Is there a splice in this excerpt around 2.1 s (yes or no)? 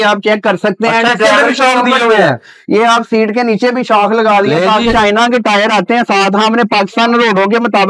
no